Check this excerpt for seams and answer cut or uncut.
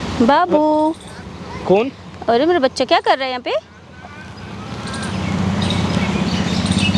uncut